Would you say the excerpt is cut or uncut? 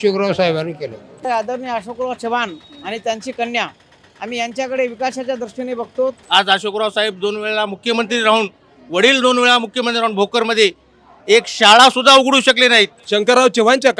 cut